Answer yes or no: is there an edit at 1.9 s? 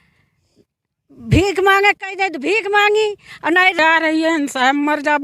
no